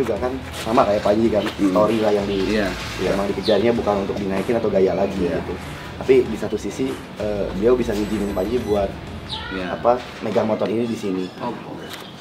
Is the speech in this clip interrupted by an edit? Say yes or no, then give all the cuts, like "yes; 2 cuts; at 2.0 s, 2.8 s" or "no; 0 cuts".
no; 0 cuts